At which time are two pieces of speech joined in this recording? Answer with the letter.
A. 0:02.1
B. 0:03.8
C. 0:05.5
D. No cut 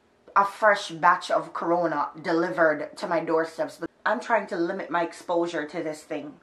B